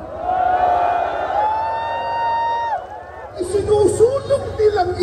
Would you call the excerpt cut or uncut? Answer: cut